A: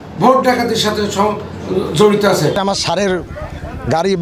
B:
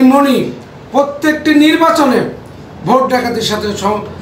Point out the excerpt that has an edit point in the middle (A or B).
A